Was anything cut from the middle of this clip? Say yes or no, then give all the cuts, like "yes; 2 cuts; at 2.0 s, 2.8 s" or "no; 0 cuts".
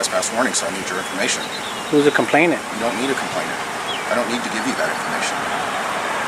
no; 0 cuts